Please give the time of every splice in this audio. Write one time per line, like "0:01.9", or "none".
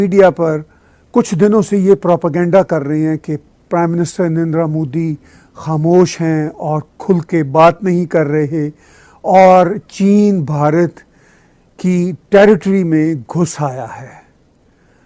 none